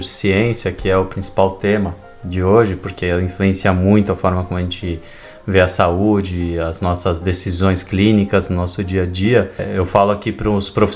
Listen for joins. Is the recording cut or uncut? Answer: uncut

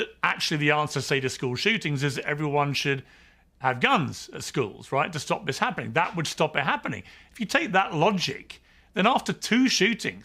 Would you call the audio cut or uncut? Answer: cut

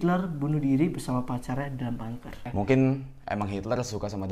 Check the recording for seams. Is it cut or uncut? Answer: cut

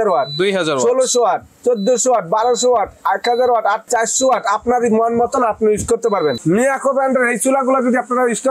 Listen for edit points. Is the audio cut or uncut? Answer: cut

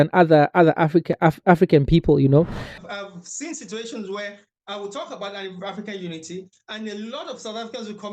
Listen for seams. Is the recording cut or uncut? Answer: cut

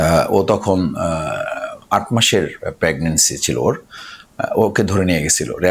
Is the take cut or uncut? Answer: uncut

